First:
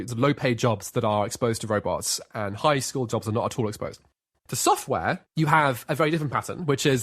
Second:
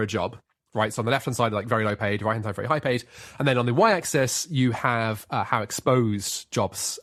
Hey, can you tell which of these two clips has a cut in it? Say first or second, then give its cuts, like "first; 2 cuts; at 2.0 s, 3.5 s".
first; 2 cuts; at 4.2 s, 5.2 s